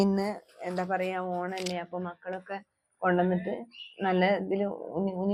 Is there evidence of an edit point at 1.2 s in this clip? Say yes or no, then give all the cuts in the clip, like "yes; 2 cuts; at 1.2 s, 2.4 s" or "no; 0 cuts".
no; 0 cuts